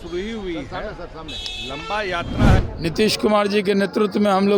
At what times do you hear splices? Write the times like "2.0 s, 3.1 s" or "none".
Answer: 2.7 s